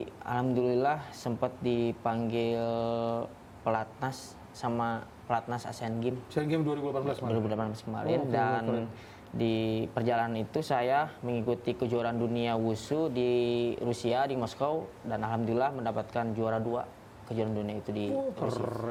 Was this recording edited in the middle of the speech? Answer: no; 0 cuts

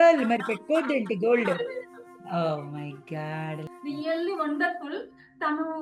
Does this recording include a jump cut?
yes; 1 cut; at 3.7 s

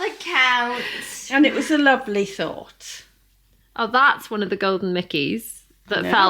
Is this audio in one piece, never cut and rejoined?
yes; 0 cuts

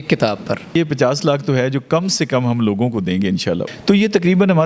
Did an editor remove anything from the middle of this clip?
yes; 2 cuts; at 0.7 s, 3.7 s

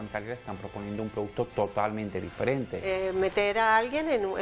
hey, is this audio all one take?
no; 1 cut; at 2.8 s

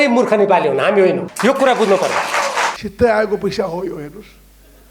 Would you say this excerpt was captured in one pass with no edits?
no; 2 cuts; at 1.3 s, 2.7 s

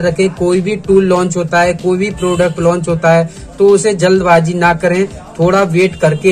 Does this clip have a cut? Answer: no; 0 cuts

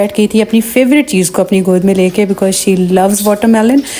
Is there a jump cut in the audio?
no; 0 cuts

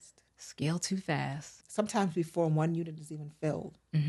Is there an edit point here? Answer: yes; 1 cut; at 1.6 s

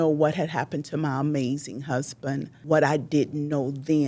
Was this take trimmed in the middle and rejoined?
yes; 1 cut; at 2.5 s

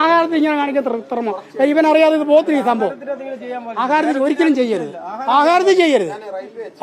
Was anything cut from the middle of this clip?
no; 0 cuts

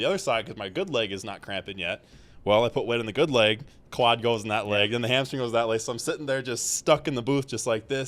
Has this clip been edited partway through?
no; 0 cuts

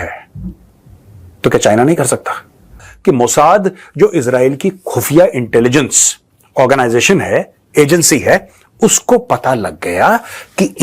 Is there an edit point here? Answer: yes; 1 cut; at 2.9 s

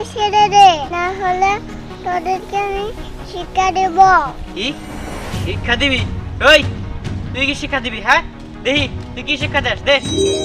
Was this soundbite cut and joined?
no; 0 cuts

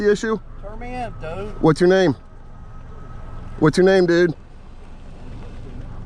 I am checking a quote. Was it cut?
no; 0 cuts

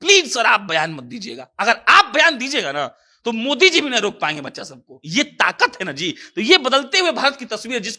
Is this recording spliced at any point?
no; 0 cuts

